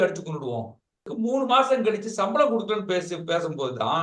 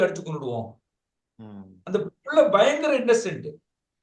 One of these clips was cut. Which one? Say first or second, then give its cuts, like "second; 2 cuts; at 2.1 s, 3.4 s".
first; 1 cut; at 1.1 s